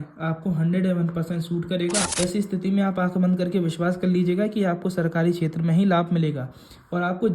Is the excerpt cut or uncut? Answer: cut